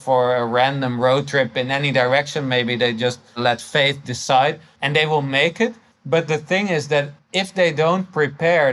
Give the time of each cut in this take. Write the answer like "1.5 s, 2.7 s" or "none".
3.4 s, 4.7 s, 5.9 s, 7.2 s